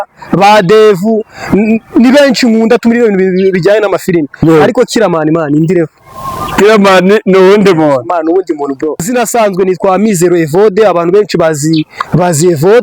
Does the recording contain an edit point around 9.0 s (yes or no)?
yes